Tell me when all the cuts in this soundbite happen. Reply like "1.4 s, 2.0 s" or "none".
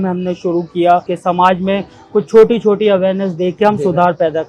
1.1 s